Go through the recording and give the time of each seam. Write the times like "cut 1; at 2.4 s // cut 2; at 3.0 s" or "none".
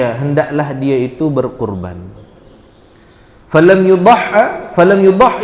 none

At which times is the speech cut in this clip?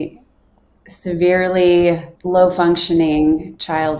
cut 1; at 2.1 s

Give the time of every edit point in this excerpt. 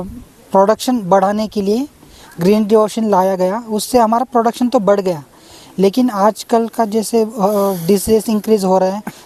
none

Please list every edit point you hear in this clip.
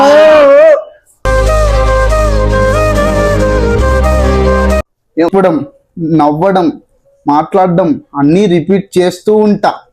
cut 1; at 5.3 s

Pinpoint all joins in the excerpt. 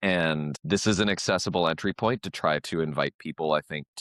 none

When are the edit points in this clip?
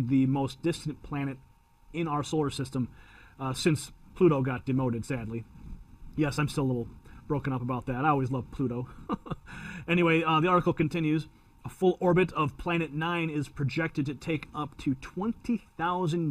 cut 1; at 14.0 s

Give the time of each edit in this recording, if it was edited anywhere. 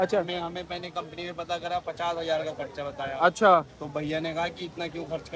none

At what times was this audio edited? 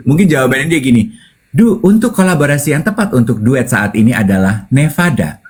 none

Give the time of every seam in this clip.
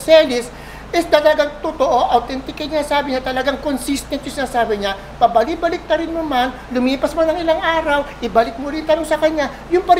none

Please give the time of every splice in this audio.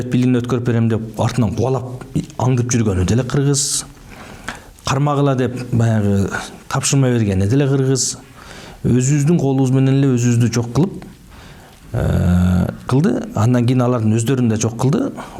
none

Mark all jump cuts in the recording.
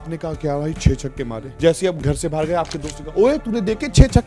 cut 1; at 1.4 s

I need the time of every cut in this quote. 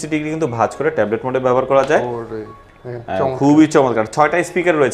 none

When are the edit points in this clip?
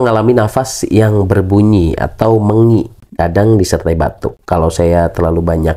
none

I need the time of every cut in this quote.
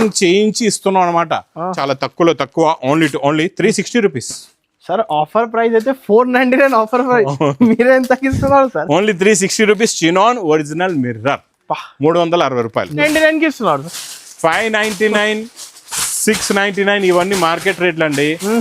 cut 1; at 1.7 s // cut 2; at 13.0 s

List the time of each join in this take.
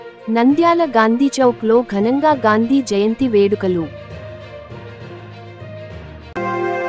none

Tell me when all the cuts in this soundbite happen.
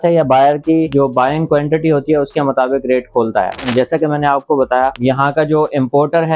cut 1; at 0.9 s // cut 2; at 3.6 s // cut 3; at 5.0 s

